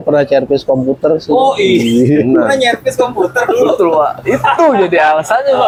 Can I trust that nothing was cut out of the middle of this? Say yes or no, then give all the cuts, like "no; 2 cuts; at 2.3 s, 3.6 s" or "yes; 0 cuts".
yes; 0 cuts